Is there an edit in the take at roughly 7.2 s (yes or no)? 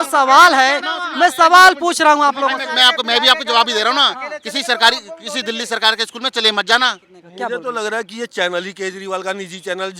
yes